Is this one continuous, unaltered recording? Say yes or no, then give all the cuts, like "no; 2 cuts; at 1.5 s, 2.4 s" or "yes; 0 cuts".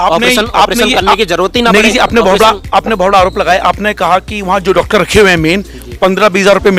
yes; 0 cuts